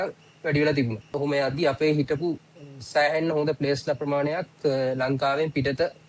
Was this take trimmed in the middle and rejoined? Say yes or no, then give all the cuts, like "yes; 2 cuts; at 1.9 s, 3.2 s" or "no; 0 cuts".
yes; 1 cut; at 1.2 s